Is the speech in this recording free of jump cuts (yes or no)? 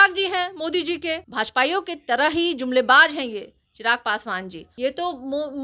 no